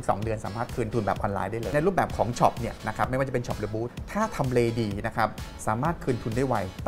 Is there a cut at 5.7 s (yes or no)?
no